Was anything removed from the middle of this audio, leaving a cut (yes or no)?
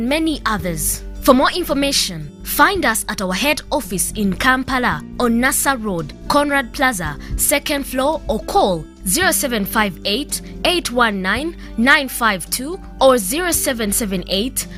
no